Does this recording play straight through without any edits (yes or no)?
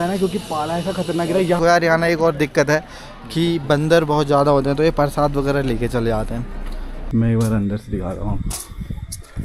no